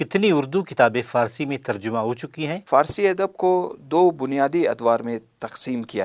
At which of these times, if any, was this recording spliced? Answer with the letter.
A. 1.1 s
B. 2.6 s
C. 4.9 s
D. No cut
B